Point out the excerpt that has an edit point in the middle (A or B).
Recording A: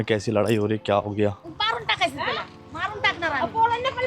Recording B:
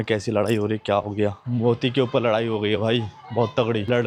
A